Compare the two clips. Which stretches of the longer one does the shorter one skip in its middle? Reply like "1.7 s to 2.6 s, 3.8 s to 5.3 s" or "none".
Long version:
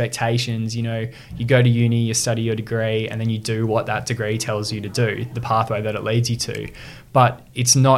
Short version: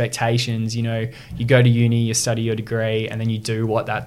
none